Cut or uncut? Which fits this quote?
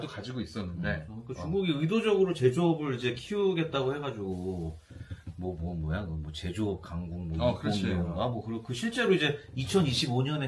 cut